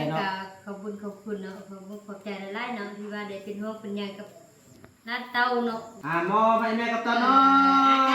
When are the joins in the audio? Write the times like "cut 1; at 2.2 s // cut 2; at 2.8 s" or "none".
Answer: cut 1; at 5.9 s